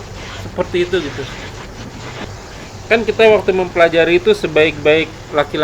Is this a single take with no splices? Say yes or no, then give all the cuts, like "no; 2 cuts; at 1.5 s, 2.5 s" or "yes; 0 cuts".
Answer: no; 1 cut; at 2.2 s